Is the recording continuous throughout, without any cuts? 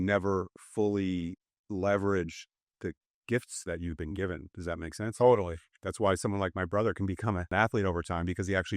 no; 1 cut; at 7.5 s

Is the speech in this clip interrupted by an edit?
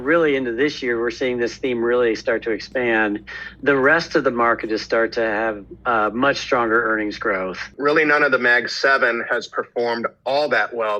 yes; 1 cut; at 7.7 s

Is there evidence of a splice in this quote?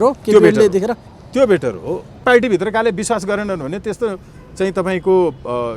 yes; 1 cut; at 2.2 s

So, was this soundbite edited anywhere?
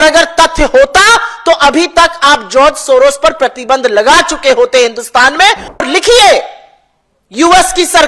yes; 1 cut; at 5.8 s

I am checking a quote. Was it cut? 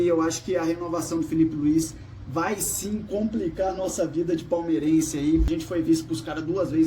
yes; 1 cut; at 5.5 s

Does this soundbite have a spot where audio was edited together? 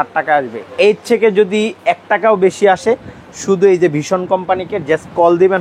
no; 0 cuts

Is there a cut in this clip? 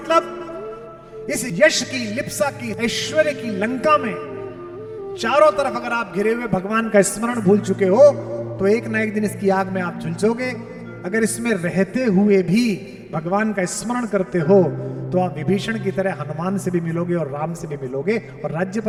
no; 0 cuts

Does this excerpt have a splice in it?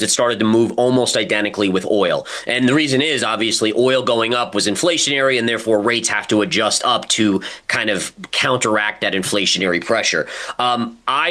no; 0 cuts

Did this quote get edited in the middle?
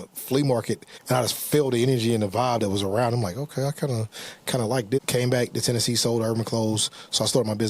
yes; 2 cuts; at 0.9 s, 5.0 s

